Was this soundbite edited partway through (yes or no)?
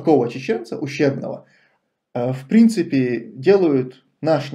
yes